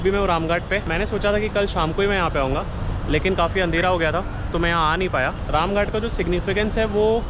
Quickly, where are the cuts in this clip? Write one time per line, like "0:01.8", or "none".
none